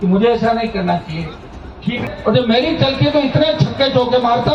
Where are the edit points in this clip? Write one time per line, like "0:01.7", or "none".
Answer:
0:02.0